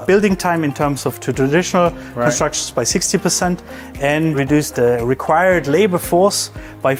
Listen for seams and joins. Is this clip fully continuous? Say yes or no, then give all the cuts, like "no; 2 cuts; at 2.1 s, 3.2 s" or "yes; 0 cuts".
yes; 0 cuts